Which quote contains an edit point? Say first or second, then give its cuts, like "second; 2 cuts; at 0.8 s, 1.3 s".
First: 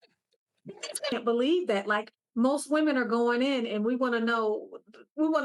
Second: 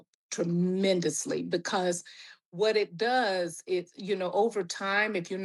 first; 1 cut; at 1.1 s